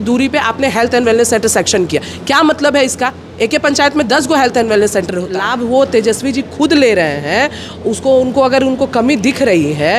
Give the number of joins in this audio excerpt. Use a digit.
1